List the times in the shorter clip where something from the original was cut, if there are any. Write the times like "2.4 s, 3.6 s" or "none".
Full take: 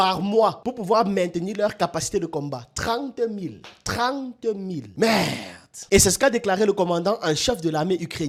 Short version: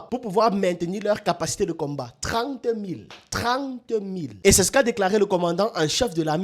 4.2 s